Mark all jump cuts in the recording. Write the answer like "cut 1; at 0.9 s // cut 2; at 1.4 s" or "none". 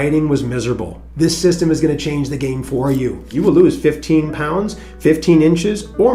cut 1; at 1.0 s // cut 2; at 3.2 s